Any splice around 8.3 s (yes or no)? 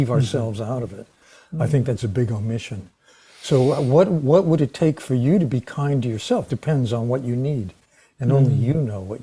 no